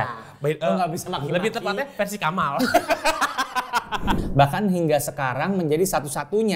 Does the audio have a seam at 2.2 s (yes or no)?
no